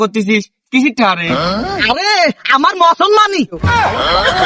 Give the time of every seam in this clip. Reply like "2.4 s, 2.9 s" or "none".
none